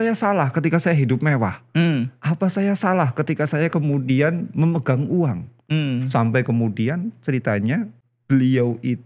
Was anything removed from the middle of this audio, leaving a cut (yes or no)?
no